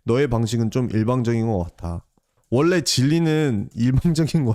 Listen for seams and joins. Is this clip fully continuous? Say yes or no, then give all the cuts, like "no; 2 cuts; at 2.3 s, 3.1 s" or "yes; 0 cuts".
yes; 0 cuts